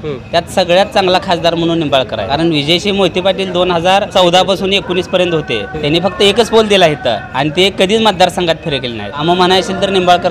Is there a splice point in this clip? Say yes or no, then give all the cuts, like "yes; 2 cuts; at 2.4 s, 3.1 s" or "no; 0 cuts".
yes; 5 cuts; at 2.2 s, 4.1 s, 5.7 s, 7.3 s, 9.2 s